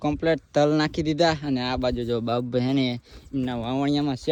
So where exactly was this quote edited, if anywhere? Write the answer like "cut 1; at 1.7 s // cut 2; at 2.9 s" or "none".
none